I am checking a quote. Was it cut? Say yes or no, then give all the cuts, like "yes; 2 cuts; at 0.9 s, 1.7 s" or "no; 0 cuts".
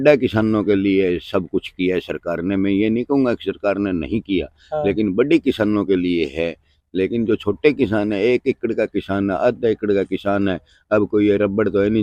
no; 0 cuts